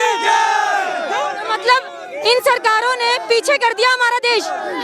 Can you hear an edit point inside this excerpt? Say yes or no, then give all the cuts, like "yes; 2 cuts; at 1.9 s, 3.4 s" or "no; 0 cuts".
no; 0 cuts